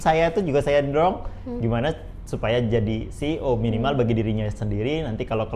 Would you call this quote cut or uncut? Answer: uncut